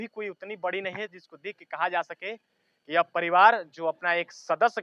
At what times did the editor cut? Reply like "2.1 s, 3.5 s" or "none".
none